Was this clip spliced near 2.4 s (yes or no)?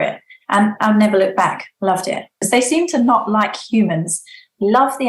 yes